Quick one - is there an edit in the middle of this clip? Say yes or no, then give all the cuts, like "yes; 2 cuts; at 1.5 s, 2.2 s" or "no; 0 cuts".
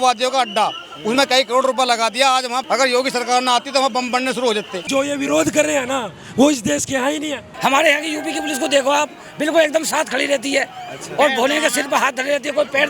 yes; 3 cuts; at 2.6 s, 4.9 s, 7.5 s